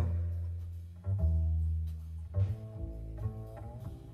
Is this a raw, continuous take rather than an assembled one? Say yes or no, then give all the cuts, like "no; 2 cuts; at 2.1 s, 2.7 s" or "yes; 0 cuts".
yes; 0 cuts